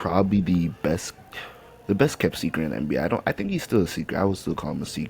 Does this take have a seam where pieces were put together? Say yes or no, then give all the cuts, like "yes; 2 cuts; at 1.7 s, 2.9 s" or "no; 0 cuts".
no; 0 cuts